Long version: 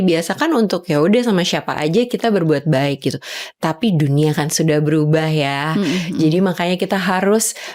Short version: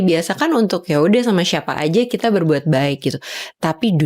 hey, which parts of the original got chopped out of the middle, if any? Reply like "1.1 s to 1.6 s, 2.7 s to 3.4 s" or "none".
none